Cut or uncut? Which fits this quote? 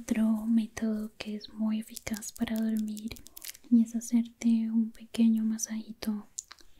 uncut